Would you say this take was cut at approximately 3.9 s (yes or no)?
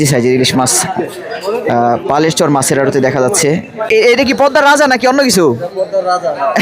yes